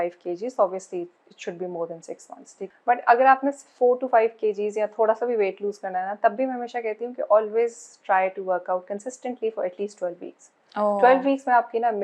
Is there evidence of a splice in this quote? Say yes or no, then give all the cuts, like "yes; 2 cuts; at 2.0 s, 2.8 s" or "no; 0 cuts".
yes; 1 cut; at 2.6 s